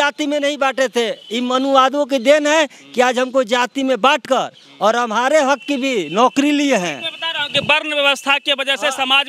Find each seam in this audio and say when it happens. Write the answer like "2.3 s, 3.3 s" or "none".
none